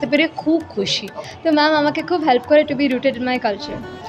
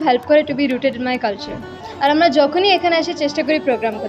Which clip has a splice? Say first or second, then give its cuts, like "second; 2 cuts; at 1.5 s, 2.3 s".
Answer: first; 1 cut; at 1.2 s